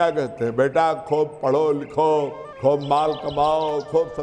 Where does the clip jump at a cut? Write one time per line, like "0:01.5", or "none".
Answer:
0:02.4